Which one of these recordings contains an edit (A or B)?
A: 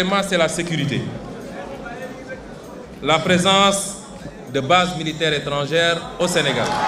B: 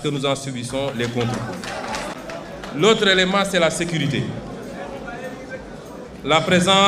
B